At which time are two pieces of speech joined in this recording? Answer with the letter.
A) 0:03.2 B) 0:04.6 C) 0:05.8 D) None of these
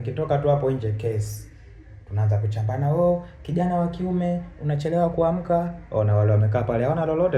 D